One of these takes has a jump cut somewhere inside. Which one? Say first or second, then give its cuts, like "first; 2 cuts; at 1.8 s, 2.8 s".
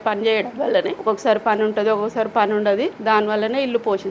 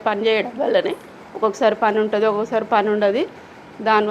first; 2 cuts; at 0.9 s, 3.0 s